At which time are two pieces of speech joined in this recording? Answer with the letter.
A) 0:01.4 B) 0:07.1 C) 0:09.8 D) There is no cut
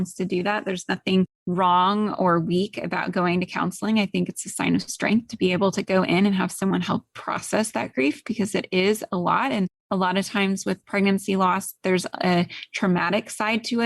A